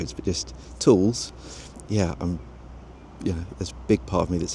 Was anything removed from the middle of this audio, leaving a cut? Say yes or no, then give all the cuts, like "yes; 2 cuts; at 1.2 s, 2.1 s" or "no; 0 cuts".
yes; 1 cut; at 1.7 s